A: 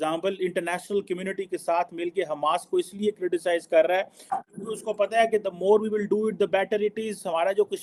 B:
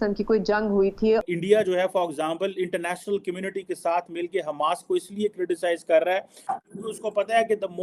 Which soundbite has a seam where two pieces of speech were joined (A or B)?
B